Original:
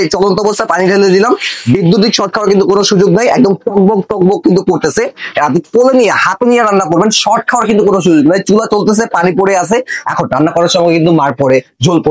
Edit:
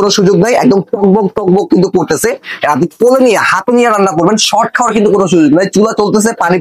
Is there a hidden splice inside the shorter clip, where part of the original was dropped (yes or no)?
no